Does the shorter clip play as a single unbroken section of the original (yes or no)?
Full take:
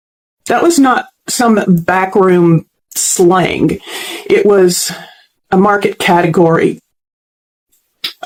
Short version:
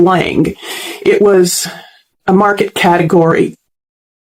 yes